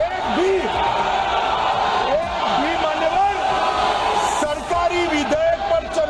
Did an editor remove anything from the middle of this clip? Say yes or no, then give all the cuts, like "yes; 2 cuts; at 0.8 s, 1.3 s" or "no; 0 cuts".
no; 0 cuts